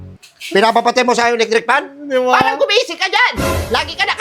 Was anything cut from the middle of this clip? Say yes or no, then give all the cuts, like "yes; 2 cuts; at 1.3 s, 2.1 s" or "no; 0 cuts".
no; 0 cuts